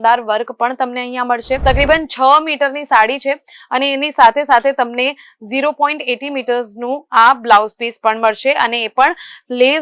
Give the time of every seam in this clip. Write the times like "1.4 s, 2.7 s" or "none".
1.6 s